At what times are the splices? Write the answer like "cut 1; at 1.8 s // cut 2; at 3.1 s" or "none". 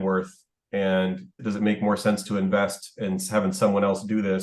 none